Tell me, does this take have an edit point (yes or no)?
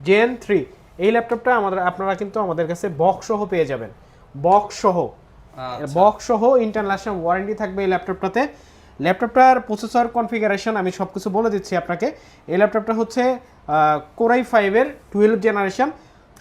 no